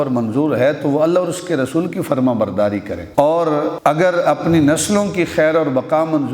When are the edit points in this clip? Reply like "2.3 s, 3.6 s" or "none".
3.0 s